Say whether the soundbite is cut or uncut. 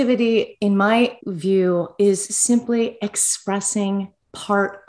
cut